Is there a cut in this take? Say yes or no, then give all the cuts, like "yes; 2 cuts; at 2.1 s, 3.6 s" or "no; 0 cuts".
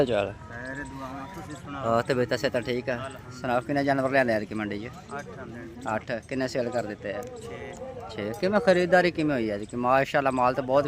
no; 0 cuts